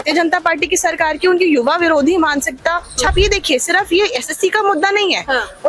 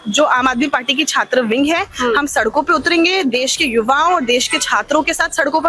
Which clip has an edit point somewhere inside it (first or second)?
first